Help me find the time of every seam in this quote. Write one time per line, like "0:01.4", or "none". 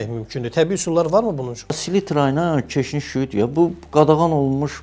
0:01.8